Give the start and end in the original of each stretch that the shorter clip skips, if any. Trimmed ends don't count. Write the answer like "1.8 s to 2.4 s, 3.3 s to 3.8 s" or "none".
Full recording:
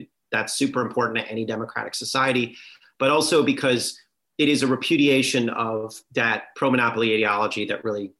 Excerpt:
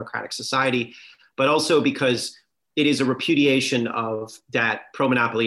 none